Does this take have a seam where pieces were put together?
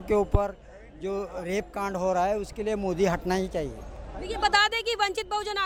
no; 0 cuts

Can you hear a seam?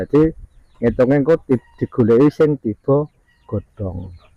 no; 0 cuts

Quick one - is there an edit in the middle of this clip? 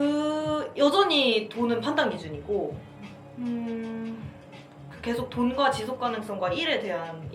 no; 0 cuts

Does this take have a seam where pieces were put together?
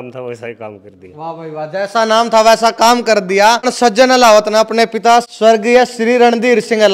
yes; 2 cuts; at 3.7 s, 5.3 s

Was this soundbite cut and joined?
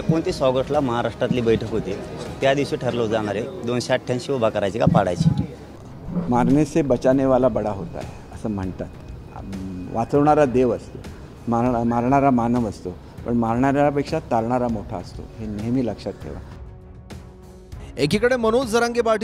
no; 0 cuts

